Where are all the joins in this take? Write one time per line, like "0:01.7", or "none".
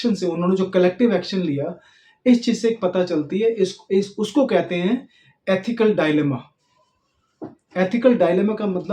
none